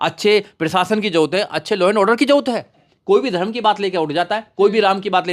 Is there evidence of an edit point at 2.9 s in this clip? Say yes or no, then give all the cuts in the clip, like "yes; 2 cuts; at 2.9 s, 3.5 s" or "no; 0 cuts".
yes; 1 cut; at 2.9 s